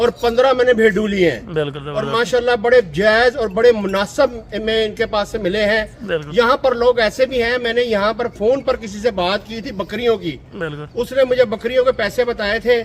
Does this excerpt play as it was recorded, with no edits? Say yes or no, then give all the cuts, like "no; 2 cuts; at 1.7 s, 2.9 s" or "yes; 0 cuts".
yes; 0 cuts